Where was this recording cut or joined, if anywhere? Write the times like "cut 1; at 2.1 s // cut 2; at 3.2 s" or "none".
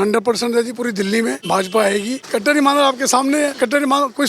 cut 1; at 1.4 s // cut 2; at 2.2 s // cut 3; at 3.5 s